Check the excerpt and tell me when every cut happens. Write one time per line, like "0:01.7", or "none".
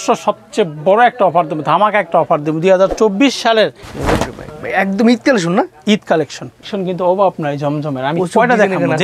0:03.8
0:06.7